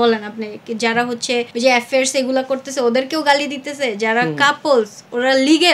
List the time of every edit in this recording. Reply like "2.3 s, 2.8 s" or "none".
1.5 s